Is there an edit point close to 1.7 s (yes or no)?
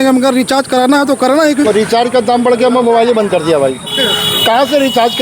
yes